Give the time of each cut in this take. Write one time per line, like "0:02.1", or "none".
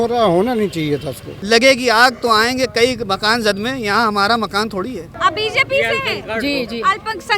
0:01.4
0:05.1